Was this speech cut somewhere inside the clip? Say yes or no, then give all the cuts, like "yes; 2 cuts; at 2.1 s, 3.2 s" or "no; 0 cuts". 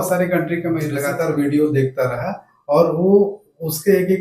yes; 1 cut; at 1.0 s